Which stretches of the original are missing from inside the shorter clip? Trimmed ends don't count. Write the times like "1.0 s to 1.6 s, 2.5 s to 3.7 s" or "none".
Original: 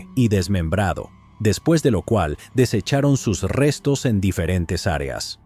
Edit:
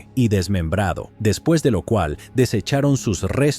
1.1 s to 1.3 s